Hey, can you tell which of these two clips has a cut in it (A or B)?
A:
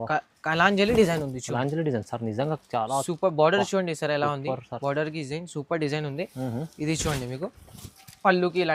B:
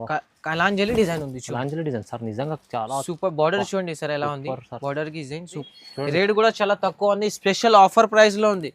B